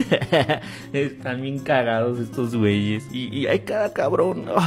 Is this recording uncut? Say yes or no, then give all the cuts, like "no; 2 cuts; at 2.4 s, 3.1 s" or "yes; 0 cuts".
no; 1 cut; at 3.4 s